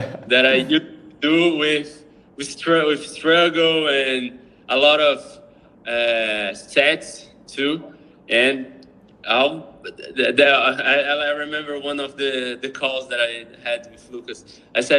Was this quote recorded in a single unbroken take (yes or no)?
yes